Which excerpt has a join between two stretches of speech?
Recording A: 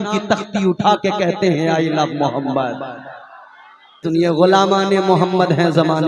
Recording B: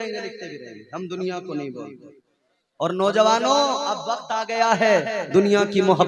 A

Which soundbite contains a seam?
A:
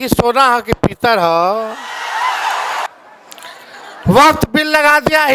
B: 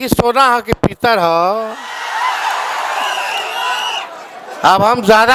A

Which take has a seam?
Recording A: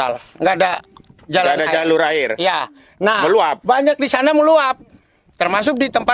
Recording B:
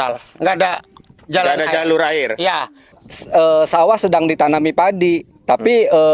B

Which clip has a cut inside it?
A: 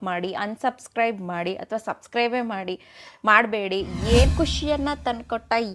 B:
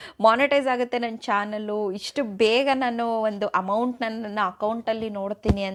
A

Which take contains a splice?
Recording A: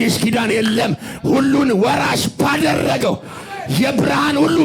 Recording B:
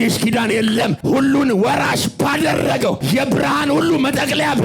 B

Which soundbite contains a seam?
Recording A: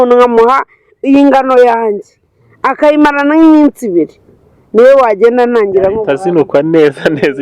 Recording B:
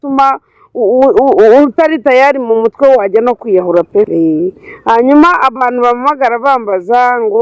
B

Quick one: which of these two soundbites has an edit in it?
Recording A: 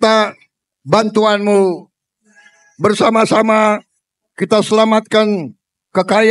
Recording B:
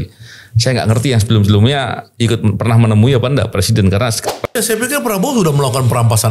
B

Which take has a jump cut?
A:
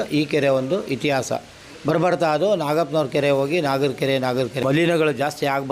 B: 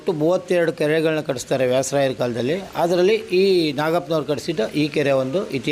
A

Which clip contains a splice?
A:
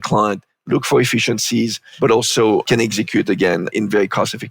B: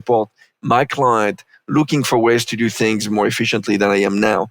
A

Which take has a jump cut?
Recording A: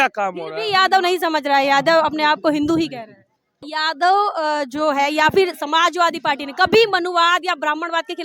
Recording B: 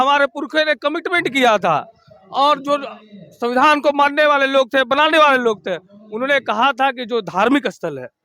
A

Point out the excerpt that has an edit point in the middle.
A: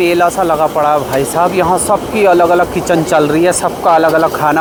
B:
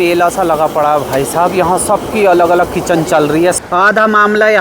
B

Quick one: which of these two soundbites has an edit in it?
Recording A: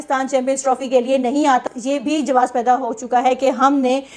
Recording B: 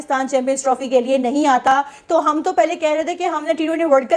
A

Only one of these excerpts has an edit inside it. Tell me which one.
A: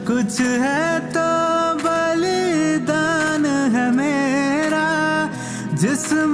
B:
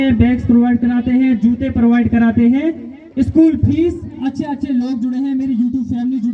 B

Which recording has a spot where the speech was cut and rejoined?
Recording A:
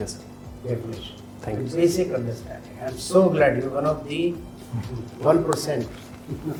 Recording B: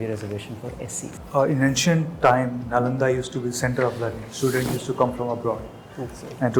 B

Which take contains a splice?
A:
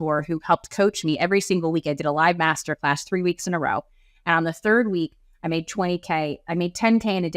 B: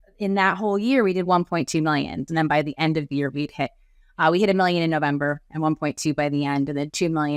B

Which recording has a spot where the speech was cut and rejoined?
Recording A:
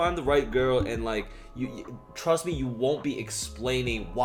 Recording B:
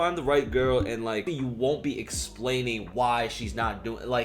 B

